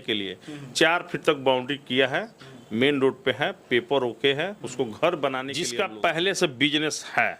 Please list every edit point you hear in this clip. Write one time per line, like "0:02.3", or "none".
0:05.6

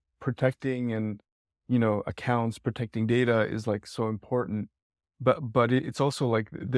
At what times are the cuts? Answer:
none

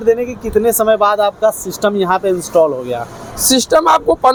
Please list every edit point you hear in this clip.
none

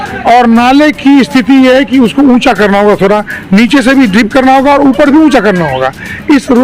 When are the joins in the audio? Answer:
none

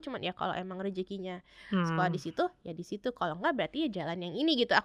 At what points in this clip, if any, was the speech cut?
none

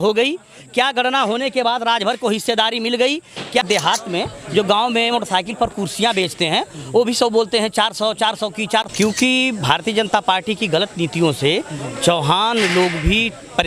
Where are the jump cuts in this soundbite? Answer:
0:03.6
0:08.9

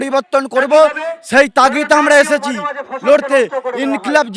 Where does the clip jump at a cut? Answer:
none

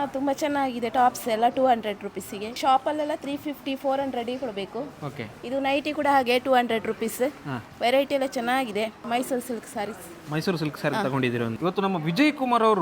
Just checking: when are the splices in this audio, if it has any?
0:02.6
0:09.0
0:11.5

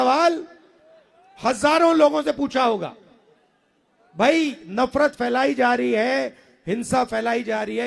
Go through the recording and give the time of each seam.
none

